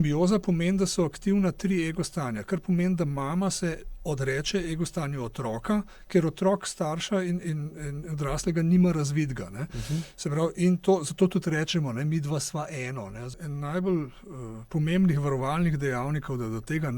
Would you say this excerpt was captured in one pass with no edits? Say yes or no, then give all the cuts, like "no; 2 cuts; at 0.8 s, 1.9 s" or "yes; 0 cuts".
no; 1 cut; at 13.3 s